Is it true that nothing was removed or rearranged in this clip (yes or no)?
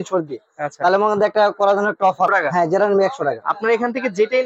no